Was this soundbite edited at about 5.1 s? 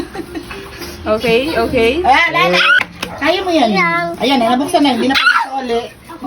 no; 1 cut; at 2.8 s

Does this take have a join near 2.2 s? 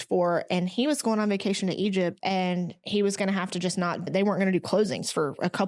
yes; 2 cuts; at 2.2 s, 4.1 s

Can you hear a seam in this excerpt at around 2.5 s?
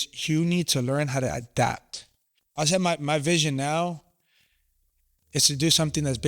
yes; 1 cut; at 2.5 s

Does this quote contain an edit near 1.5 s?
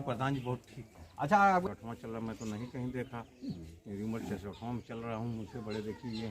yes; 1 cut; at 1.5 s

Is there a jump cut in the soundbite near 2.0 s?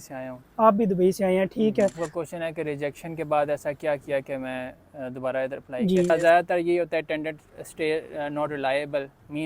yes; 2 cuts; at 2.0 s, 6.1 s

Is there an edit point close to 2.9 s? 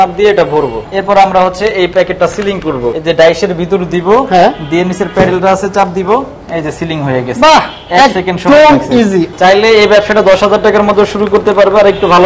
yes; 3 cuts; at 0.9 s, 2.9 s, 9.3 s

